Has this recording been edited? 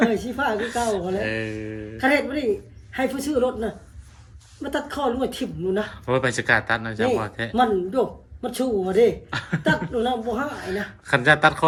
no; 0 cuts

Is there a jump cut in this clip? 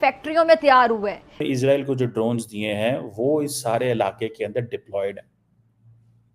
yes; 1 cut; at 1.4 s

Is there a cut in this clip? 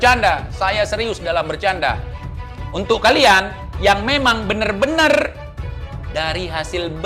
yes; 1 cut; at 2.2 s

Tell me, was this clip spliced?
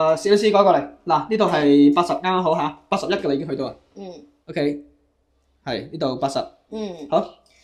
no; 0 cuts

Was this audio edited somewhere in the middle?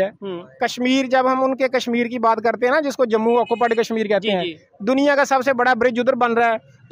no; 0 cuts

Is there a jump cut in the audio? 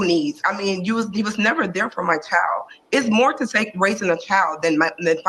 no; 0 cuts

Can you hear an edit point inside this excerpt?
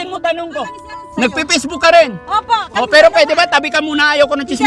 yes; 1 cut; at 1.1 s

